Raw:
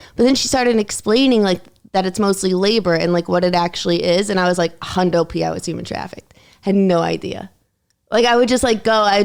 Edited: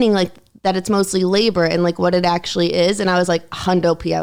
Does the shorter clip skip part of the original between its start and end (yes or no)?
no